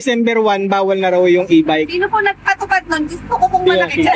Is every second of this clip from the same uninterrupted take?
yes; 0 cuts

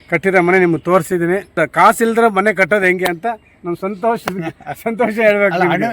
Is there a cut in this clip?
yes; 1 cut; at 1.5 s

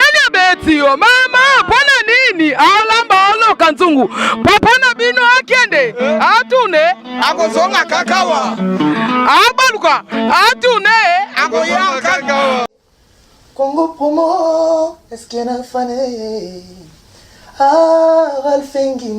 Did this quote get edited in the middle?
yes; 1 cut; at 12.7 s

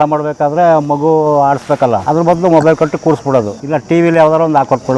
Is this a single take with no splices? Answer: no; 2 cuts; at 2.0 s, 3.6 s

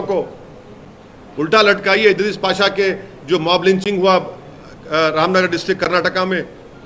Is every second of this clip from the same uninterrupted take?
yes; 0 cuts

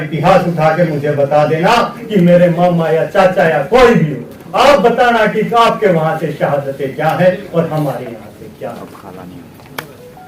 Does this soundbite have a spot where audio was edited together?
no; 0 cuts

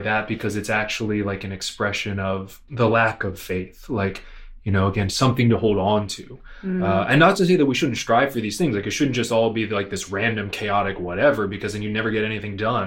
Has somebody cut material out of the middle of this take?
yes; 1 cut; at 2.6 s

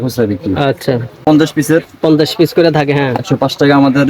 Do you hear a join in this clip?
yes; 1 cut; at 1.2 s

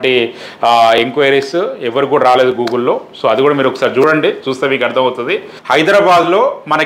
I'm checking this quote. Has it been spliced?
yes; 1 cut; at 5.5 s

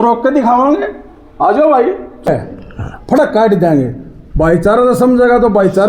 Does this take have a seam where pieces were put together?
yes; 1 cut; at 2.3 s

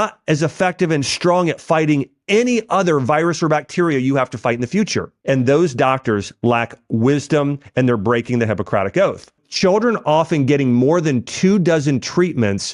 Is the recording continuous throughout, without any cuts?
no; 2 cuts; at 5.1 s, 9.5 s

